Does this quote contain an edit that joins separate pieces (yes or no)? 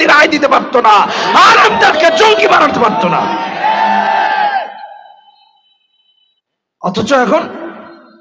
no